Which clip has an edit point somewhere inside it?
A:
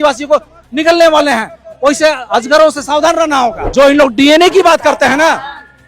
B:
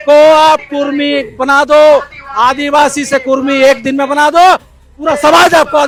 A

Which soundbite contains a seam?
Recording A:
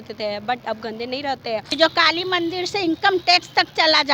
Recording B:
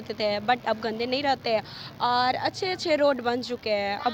A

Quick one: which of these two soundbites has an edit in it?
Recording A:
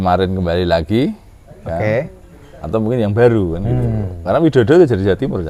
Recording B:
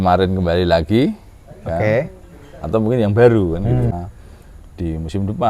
B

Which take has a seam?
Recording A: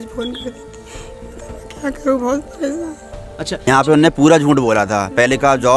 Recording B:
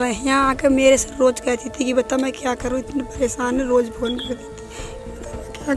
A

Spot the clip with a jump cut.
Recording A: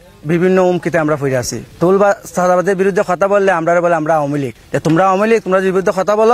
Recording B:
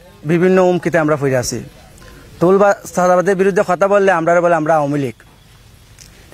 A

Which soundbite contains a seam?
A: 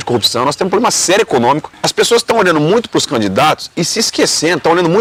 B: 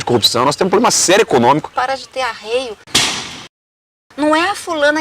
B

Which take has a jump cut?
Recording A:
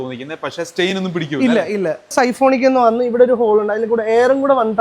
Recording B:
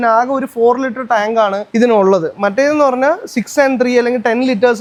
A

